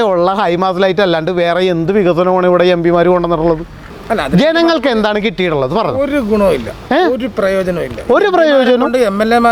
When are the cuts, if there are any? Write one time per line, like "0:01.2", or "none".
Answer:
none